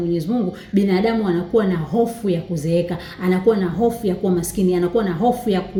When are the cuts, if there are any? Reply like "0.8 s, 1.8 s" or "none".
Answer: none